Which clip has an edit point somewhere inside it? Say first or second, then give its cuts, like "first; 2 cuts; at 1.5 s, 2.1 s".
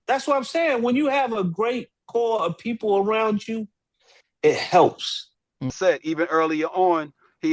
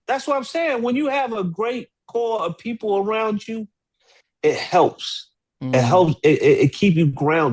first; 1 cut; at 5.7 s